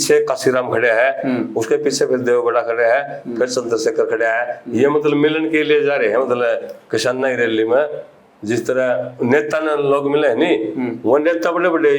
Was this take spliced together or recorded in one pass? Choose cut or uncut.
uncut